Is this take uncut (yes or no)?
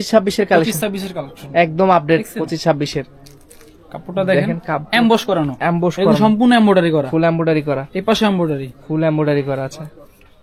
yes